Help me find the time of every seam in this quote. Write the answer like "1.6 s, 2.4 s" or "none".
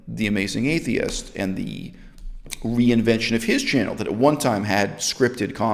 none